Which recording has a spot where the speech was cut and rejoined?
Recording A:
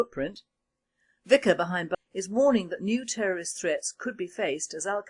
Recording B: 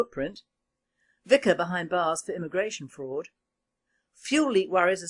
B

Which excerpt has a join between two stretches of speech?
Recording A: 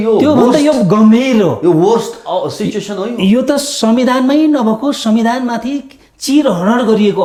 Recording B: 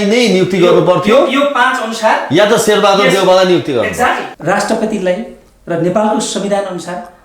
B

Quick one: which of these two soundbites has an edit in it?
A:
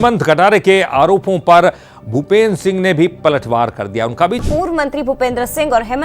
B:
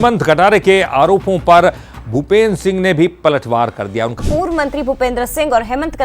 B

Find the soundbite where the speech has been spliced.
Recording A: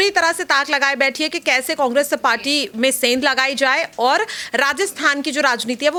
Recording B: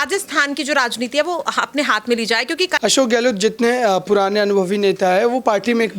B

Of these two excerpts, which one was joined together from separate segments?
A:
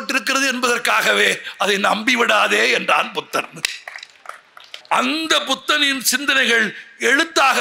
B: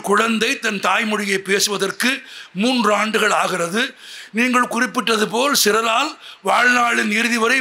A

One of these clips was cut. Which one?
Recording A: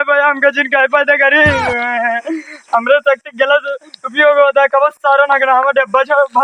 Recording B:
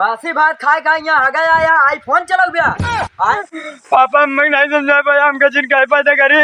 B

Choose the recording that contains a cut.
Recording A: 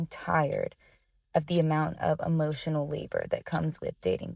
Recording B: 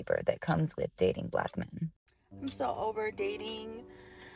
B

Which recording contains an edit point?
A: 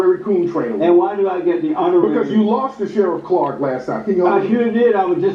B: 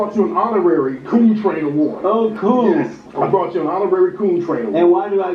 B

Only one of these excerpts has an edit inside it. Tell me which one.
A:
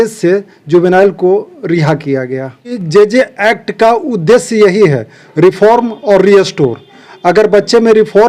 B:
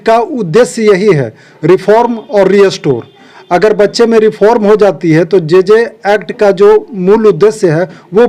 A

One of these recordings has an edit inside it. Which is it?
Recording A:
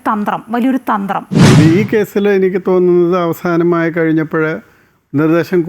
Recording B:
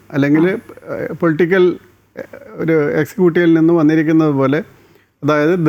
A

